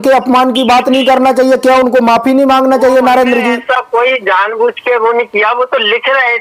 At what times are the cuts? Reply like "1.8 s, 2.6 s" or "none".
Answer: none